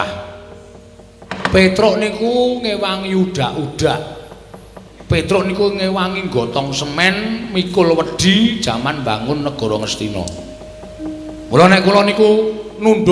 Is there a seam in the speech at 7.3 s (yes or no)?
no